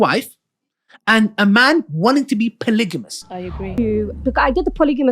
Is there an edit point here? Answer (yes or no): yes